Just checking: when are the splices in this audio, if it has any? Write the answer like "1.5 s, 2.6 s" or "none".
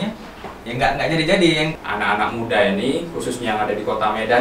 1.7 s